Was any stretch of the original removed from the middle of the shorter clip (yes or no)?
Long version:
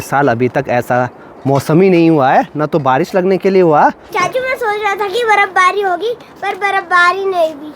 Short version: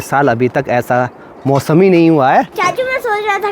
yes